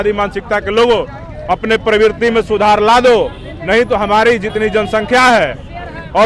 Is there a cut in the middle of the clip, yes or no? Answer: no